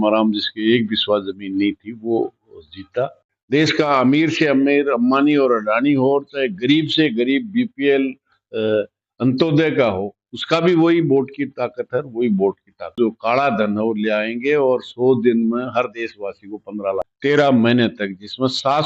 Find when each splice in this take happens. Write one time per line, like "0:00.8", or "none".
0:03.3
0:13.0
0:17.1